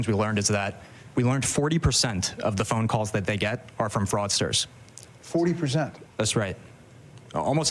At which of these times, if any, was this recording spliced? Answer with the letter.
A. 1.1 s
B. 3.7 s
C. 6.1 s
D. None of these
A